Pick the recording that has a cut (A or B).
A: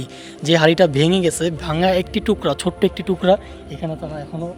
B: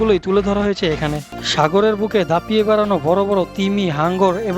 B